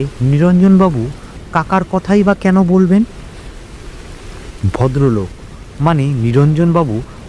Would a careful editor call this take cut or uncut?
uncut